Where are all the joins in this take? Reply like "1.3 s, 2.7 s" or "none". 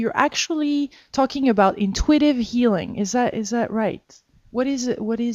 2.6 s